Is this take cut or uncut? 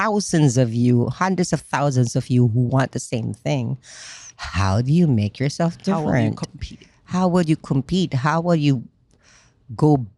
uncut